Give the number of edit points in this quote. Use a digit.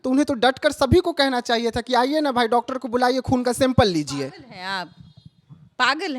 0